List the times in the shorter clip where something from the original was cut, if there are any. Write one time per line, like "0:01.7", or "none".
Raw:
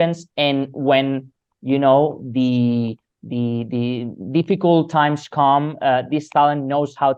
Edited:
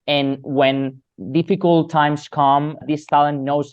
0:01.1
0:02.8